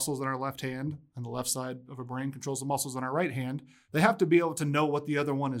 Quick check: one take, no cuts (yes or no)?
no